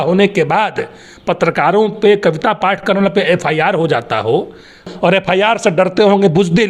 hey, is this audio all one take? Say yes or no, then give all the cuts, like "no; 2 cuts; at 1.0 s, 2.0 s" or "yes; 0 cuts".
no; 1 cut; at 4.9 s